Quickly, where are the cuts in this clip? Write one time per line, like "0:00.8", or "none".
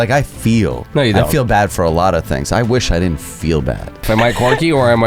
0:04.1